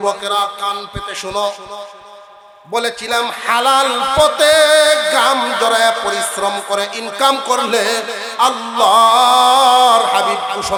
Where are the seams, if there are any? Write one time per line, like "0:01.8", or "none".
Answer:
none